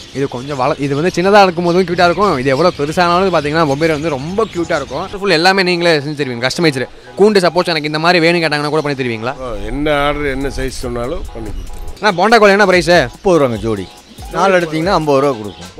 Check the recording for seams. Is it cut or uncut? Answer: cut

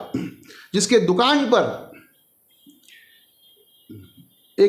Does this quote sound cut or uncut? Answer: uncut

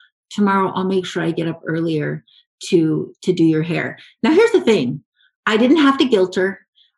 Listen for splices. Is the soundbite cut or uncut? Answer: uncut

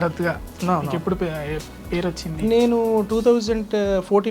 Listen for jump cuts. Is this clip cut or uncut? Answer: uncut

